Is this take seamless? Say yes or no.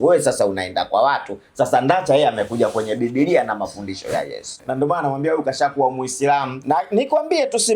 no